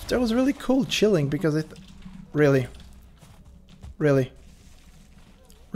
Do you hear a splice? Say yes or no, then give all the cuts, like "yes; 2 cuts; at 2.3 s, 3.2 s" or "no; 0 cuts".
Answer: no; 0 cuts